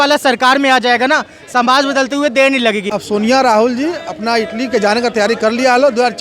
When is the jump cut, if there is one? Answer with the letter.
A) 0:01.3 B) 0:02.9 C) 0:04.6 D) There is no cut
B